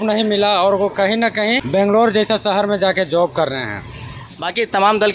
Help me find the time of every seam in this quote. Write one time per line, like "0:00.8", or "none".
0:01.6
0:04.2